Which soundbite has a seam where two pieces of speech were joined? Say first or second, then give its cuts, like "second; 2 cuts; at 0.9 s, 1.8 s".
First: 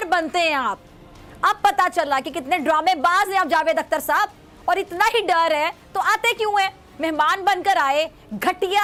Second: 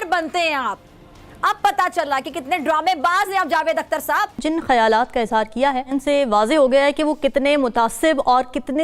second; 1 cut; at 4.3 s